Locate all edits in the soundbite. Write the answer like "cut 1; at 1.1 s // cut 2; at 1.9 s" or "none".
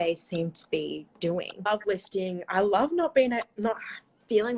cut 1; at 1.5 s